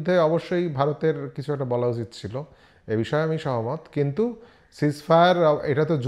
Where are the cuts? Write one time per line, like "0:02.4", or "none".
none